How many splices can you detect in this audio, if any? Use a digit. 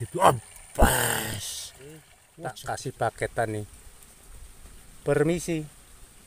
1